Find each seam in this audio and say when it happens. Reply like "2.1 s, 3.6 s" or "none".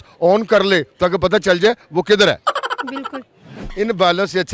3.6 s